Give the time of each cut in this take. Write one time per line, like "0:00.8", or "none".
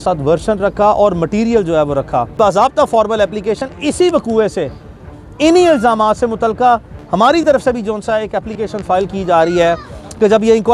0:02.3